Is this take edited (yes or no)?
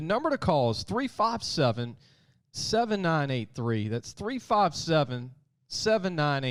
no